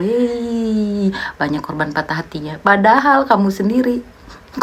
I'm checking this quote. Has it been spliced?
no; 0 cuts

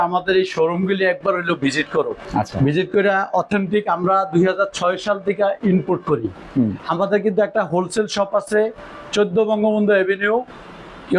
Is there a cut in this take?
yes; 1 cut; at 2.2 s

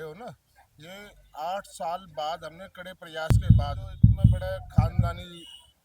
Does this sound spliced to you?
yes; 2 cuts; at 3.3 s, 5.0 s

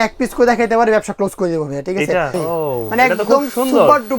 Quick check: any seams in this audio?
yes; 1 cut; at 2.3 s

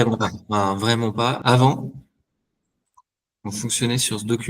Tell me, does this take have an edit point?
yes; 1 cut; at 1.4 s

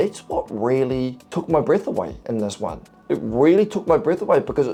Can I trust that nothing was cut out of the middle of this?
yes; 0 cuts

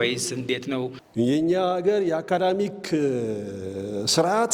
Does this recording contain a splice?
yes; 1 cut; at 0.9 s

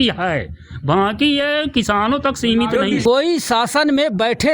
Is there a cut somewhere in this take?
yes; 1 cut; at 3.0 s

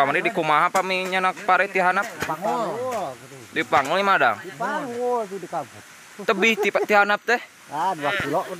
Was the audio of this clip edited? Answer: no; 0 cuts

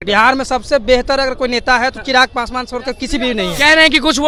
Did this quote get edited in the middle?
no; 0 cuts

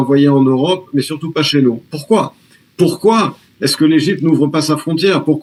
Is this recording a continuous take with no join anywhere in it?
yes; 0 cuts

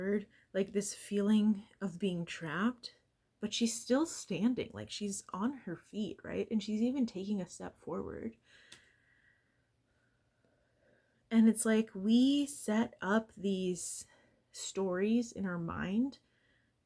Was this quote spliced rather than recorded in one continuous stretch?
no; 0 cuts

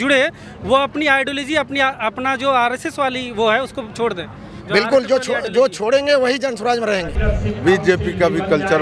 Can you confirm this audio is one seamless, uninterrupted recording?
no; 1 cut; at 7.2 s

